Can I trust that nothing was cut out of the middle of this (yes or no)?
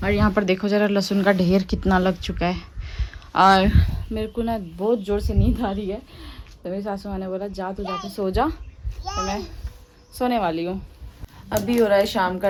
yes